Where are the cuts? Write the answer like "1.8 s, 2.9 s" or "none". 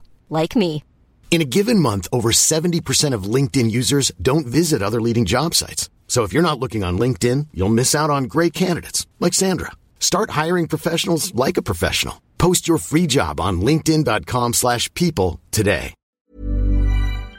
16.2 s